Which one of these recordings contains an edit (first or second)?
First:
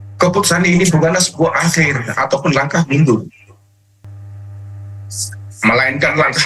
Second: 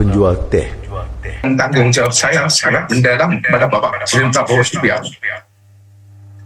second